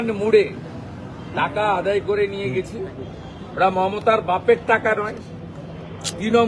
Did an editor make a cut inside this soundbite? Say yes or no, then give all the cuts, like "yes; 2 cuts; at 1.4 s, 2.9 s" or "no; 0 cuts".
no; 0 cuts